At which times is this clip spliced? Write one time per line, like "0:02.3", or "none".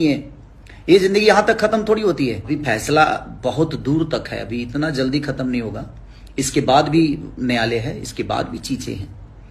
0:02.5